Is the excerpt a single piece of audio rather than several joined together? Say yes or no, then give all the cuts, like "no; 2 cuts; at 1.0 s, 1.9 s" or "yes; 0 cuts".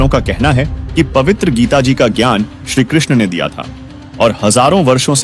yes; 0 cuts